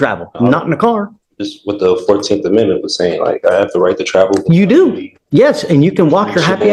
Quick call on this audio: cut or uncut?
uncut